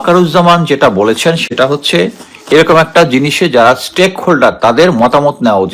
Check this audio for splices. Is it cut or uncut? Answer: uncut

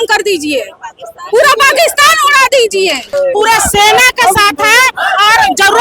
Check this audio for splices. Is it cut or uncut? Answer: cut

